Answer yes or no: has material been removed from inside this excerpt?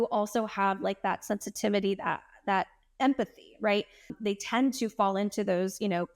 yes